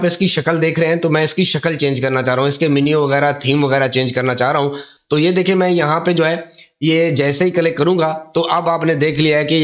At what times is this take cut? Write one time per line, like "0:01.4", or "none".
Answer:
0:04.9